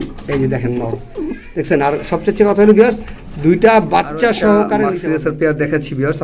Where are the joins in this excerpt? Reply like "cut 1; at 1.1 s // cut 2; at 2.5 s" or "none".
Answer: cut 1; at 5.0 s